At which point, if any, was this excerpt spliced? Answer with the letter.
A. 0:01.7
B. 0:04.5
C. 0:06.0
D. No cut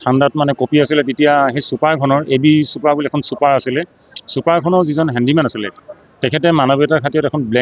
D